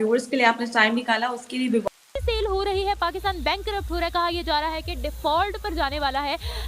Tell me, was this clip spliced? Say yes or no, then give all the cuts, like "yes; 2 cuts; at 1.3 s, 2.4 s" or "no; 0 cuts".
yes; 1 cut; at 1.8 s